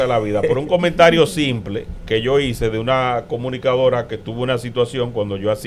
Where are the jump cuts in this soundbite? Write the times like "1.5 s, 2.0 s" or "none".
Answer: none

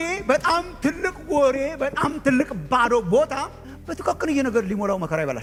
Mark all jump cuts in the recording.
none

